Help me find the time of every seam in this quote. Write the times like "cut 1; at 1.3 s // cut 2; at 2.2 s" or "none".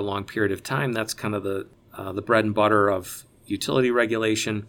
cut 1; at 1.7 s